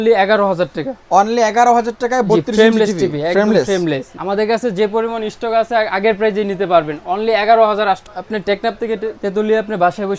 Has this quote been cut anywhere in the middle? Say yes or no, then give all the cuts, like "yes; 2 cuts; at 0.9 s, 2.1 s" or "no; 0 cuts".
yes; 2 cuts; at 4.1 s, 8.1 s